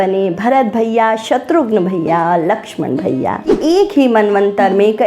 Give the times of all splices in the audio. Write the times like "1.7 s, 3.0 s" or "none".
3.5 s